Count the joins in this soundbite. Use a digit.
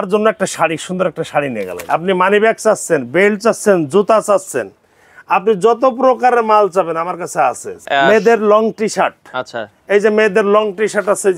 2